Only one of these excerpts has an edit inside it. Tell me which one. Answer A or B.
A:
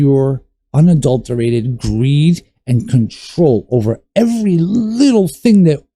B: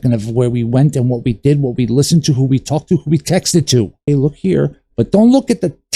B